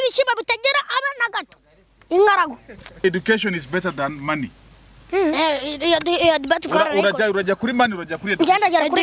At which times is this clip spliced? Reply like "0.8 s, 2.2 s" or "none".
3.0 s